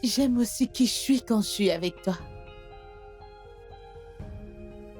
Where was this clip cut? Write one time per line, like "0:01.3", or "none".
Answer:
0:02.2